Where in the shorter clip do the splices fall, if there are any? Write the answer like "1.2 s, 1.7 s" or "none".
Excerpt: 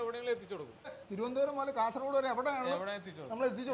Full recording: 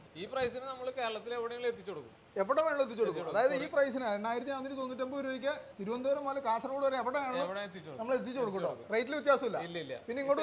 0.9 s